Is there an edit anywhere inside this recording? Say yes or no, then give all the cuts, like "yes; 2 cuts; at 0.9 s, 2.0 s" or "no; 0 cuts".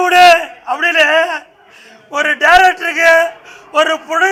no; 0 cuts